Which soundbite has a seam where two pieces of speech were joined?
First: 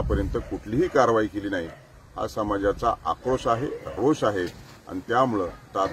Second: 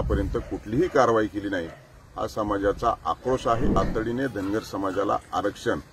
second; 1 cut; at 3.7 s

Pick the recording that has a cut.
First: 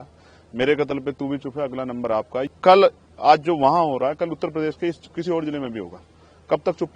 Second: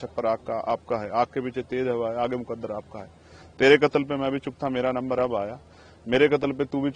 first; 1 cut; at 2.4 s

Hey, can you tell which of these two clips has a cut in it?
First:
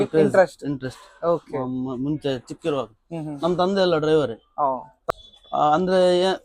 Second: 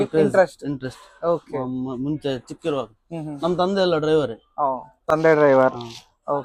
first; 1 cut; at 4.9 s

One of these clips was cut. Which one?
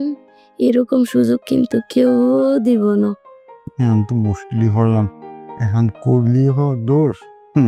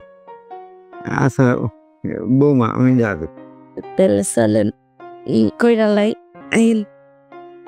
second; 1 cut; at 6.3 s

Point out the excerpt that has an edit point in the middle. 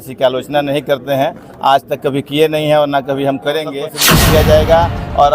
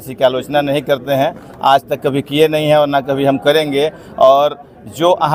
first; 1 cut; at 4.0 s

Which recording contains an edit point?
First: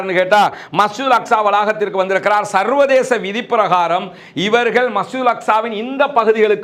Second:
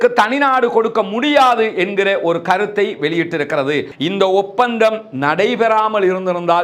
second; 1 cut; at 3.9 s

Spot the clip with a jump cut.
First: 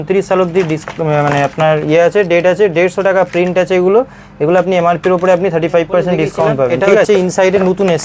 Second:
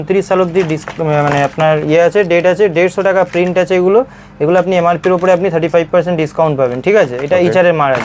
first; 1 cut; at 7.1 s

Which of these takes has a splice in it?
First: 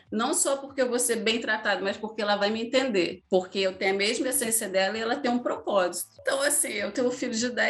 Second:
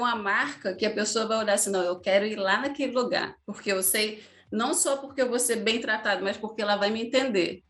first; 1 cut; at 6.2 s

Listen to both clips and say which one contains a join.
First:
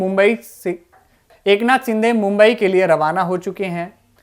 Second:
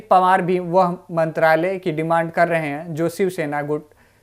first; 1 cut; at 1.3 s

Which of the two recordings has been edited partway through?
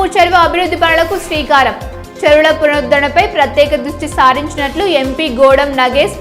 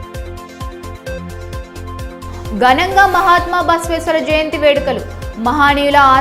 second; 1 cut; at 1.2 s

